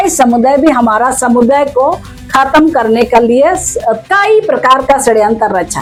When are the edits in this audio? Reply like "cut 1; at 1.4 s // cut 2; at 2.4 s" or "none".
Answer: none